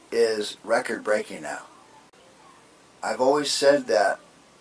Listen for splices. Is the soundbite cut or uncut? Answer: cut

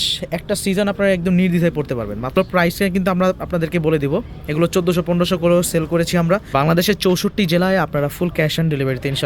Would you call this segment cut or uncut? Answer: cut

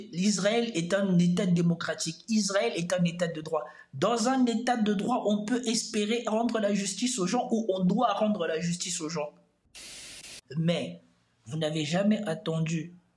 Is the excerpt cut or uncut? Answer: cut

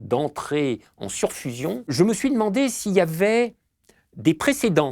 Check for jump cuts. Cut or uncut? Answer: cut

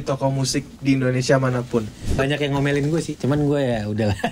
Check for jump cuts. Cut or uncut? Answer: cut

